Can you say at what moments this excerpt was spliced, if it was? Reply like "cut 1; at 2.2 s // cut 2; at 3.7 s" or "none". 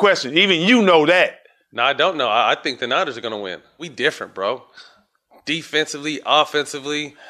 cut 1; at 3.9 s

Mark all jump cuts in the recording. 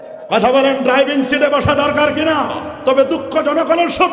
cut 1; at 2.7 s

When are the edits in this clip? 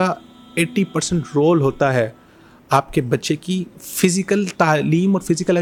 none

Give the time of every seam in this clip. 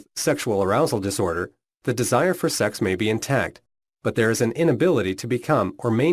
cut 1; at 4.0 s

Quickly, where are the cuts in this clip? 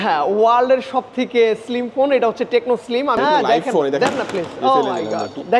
cut 1; at 3.2 s

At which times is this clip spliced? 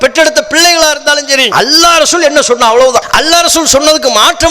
cut 1; at 1.5 s // cut 2; at 3.1 s

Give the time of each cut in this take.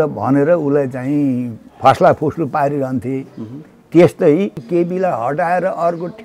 cut 1; at 4.6 s

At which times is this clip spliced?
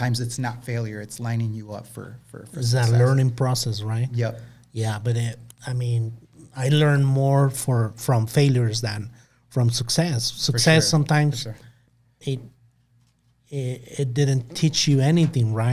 none

